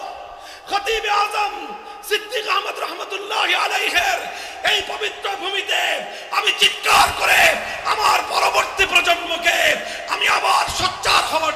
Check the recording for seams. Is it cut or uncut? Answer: uncut